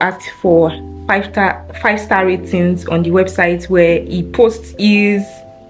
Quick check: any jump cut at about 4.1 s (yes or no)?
no